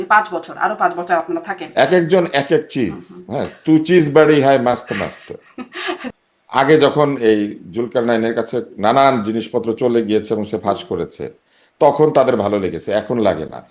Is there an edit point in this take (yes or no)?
yes